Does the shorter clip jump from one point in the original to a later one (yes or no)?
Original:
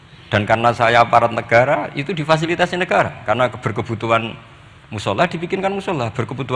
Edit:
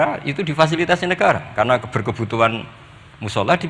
no